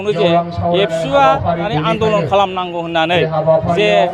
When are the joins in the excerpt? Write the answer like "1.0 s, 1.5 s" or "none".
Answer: 1.7 s